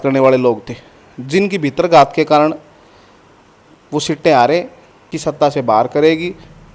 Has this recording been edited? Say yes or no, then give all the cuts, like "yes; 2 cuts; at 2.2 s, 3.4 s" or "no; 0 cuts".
yes; 1 cut; at 5.1 s